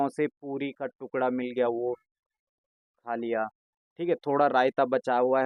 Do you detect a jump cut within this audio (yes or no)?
no